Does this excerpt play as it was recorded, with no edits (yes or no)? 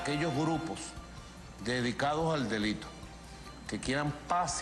yes